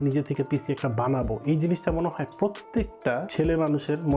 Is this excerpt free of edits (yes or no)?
yes